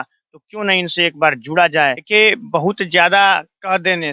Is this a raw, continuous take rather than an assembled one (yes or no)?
yes